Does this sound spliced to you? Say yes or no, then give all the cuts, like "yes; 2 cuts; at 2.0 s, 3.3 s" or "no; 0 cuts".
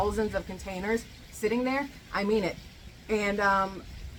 no; 0 cuts